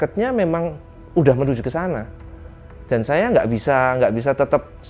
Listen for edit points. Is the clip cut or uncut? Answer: uncut